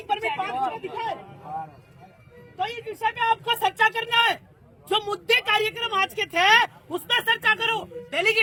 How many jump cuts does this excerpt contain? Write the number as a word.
zero